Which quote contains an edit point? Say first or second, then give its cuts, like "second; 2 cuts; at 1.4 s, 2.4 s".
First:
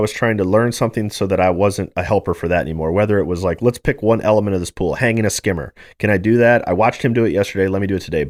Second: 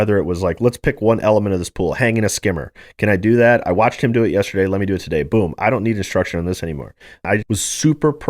second; 1 cut; at 7.3 s